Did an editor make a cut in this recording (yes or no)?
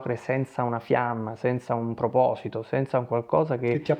no